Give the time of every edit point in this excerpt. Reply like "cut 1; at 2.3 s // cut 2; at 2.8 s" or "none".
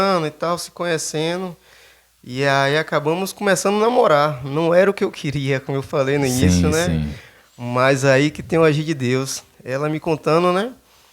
none